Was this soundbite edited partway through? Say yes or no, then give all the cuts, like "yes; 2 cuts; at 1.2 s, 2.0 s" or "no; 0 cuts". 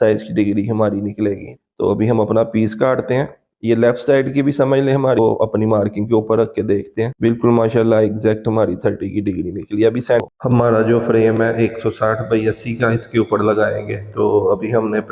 yes; 3 cuts; at 1.5 s, 5.2 s, 10.2 s